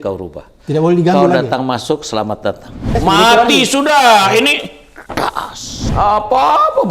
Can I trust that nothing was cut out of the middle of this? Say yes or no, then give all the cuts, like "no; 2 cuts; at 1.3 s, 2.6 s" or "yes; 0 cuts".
no; 2 cuts; at 2.9 s, 5.8 s